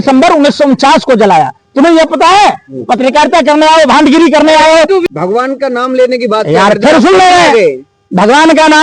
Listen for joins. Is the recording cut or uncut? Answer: cut